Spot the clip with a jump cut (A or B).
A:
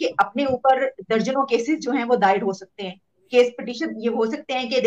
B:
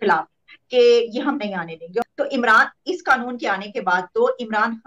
B